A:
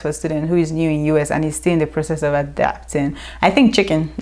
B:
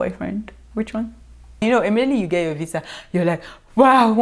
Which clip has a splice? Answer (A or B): B